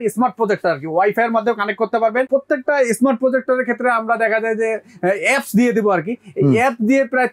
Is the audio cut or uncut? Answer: cut